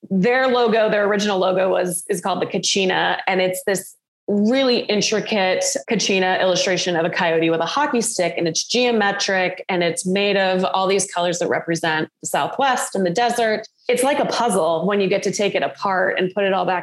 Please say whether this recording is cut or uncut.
cut